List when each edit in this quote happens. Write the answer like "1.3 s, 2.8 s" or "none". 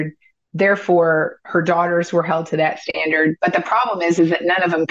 none